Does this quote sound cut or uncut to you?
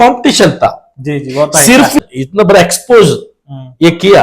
cut